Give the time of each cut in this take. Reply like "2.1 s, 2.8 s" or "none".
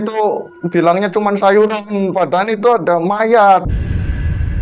3.6 s